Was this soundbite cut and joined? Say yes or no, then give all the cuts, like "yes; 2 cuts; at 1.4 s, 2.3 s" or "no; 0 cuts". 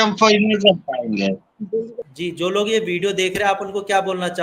yes; 1 cut; at 2.0 s